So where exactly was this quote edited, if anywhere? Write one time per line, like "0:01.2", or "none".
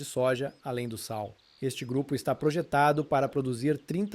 0:01.5